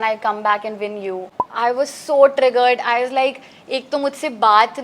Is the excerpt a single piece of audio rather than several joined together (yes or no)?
no